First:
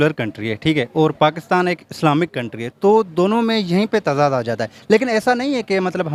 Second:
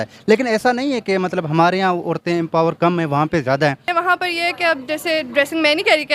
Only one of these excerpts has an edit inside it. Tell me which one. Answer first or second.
second